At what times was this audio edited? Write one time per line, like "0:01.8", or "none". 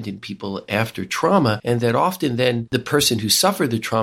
0:01.6
0:02.6